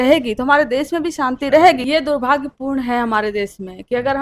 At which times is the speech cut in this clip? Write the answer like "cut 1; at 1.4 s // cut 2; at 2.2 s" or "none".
cut 1; at 1.8 s